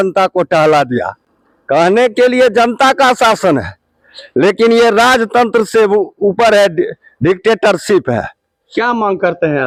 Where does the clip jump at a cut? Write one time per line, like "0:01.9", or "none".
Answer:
none